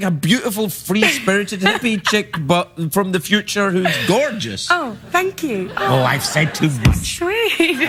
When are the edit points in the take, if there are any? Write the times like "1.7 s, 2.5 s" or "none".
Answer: none